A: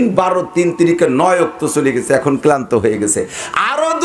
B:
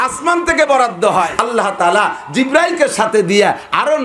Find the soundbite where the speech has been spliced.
B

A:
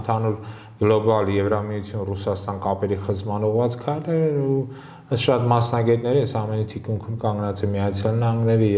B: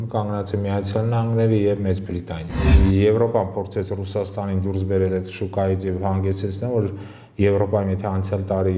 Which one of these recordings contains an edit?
B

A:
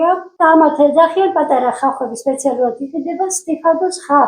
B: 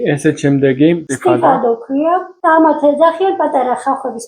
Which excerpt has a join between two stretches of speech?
B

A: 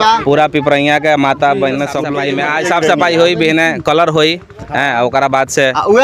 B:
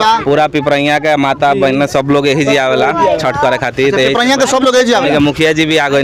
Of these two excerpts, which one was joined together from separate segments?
A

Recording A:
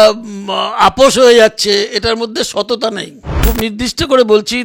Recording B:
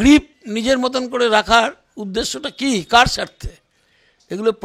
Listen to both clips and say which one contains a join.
A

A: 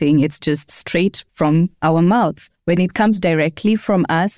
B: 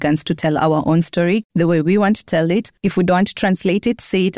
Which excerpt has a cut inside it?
A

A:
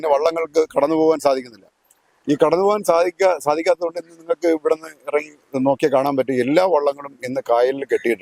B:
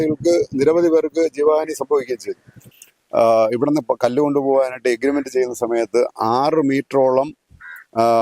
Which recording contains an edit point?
B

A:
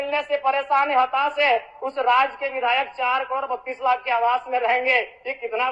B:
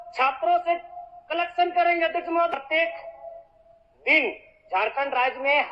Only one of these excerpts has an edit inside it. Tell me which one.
B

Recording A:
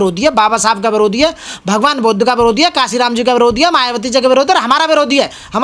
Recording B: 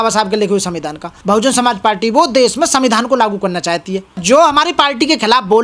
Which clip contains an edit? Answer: B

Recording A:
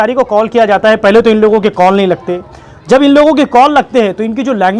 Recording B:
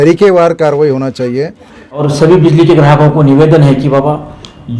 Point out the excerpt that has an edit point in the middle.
B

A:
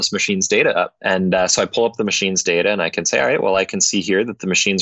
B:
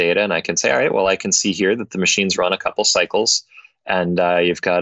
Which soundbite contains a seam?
A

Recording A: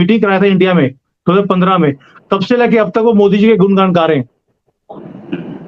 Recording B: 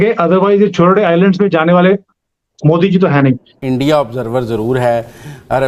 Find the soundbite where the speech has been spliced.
B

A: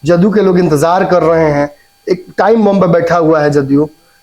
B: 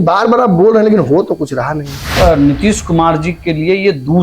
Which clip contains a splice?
B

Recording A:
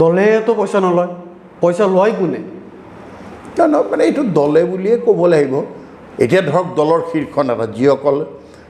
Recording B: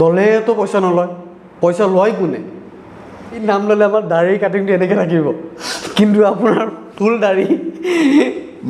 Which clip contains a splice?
B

